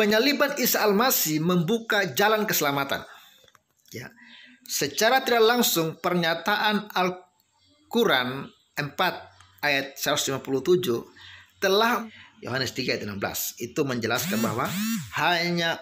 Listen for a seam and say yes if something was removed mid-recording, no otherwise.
yes